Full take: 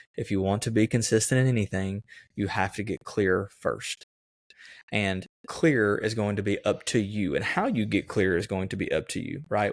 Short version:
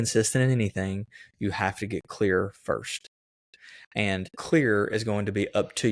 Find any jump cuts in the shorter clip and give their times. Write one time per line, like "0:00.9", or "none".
0:04.4